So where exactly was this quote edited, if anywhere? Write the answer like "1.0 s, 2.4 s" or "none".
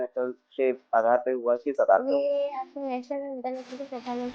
none